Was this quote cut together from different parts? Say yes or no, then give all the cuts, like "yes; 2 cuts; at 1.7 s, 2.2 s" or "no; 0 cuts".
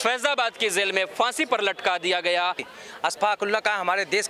yes; 1 cut; at 2.7 s